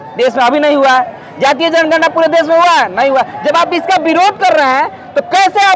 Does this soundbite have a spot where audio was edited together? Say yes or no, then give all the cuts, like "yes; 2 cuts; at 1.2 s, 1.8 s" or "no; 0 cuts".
no; 0 cuts